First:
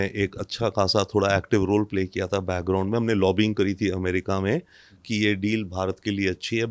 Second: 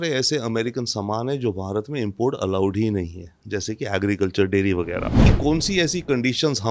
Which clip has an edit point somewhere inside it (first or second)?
second